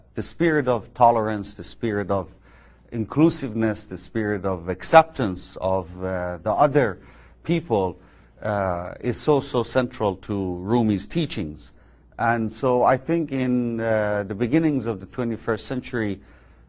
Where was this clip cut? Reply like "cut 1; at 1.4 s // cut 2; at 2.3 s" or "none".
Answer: cut 1; at 3.3 s